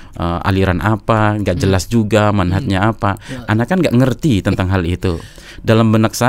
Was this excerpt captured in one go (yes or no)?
yes